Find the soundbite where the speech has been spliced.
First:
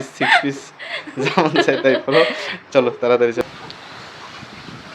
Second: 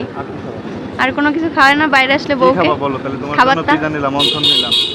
first; 1 cut; at 3.4 s

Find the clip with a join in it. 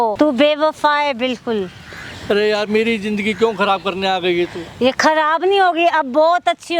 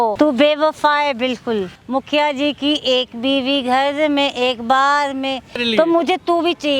second; 2 cuts; at 1.8 s, 5.6 s

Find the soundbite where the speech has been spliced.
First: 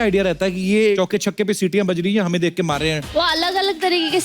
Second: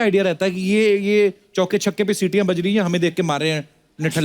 first; 2 cuts; at 1.0 s, 3.1 s

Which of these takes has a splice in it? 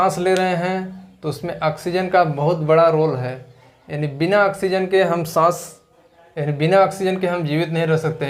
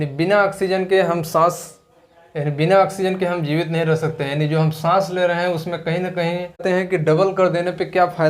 second; 1 cut; at 6.6 s

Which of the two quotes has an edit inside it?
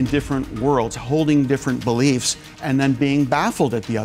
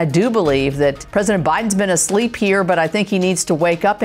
second; 1 cut; at 1.0 s

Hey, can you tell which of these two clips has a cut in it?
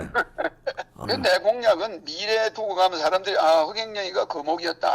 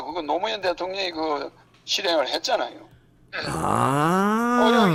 first; 1 cut; at 0.9 s

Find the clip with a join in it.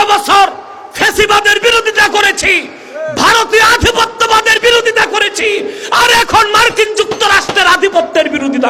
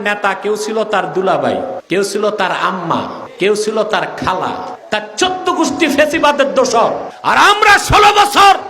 second; 4 cuts; at 1.8 s, 3.2 s, 4.8 s, 7.1 s

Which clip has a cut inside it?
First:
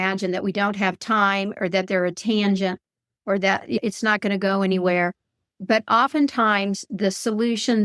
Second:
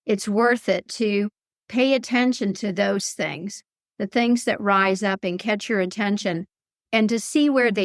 first; 1 cut; at 3.8 s

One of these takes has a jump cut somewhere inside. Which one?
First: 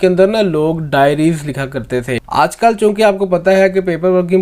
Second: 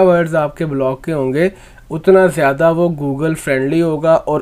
first; 1 cut; at 2.2 s

